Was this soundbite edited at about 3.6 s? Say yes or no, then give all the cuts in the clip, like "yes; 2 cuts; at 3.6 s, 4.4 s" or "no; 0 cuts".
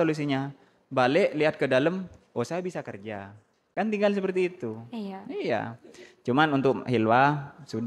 no; 0 cuts